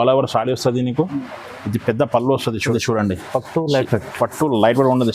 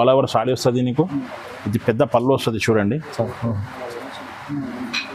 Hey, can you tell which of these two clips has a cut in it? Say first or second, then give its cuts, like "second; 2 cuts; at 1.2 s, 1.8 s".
first; 1 cut; at 2.7 s